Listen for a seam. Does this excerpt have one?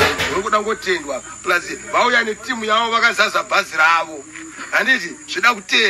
no; 0 cuts

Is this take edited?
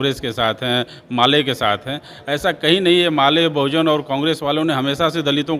no; 0 cuts

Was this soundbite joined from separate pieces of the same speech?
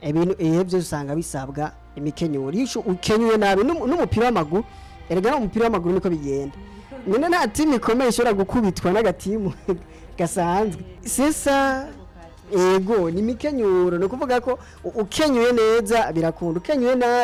no; 0 cuts

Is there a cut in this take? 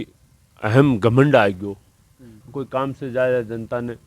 yes; 1 cut; at 2.4 s

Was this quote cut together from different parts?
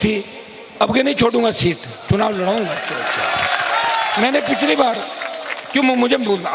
no; 0 cuts

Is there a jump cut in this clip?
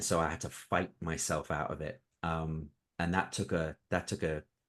no; 0 cuts

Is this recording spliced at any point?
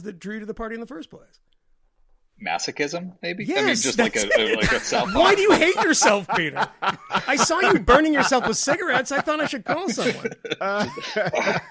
no; 0 cuts

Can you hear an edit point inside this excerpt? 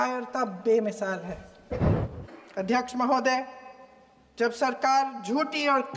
yes; 1 cut; at 1.9 s

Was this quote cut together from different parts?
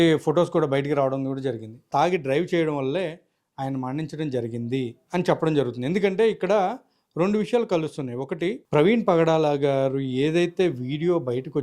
yes; 2 cuts; at 1.9 s, 8.6 s

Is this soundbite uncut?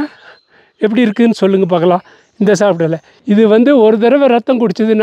no; 1 cut; at 3.1 s

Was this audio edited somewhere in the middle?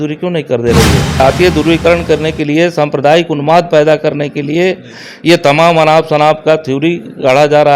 yes; 1 cut; at 1.2 s

